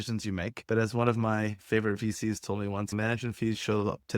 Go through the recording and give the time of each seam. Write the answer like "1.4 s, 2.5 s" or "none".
2.9 s